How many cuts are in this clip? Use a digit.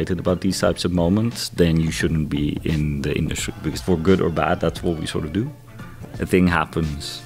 1